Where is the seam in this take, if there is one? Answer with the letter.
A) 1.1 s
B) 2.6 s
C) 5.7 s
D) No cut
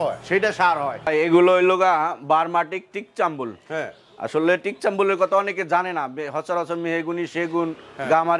A